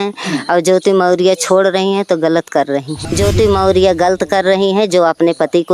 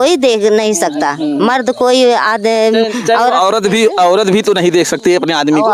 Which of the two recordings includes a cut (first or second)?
first